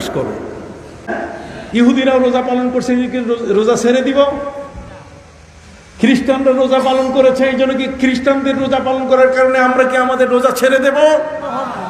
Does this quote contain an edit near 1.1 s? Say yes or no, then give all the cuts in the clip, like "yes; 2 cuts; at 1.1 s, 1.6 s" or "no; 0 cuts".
yes; 1 cut; at 1.1 s